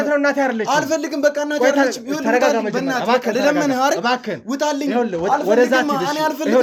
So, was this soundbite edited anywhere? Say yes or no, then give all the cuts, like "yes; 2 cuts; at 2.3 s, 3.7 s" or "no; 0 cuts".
no; 0 cuts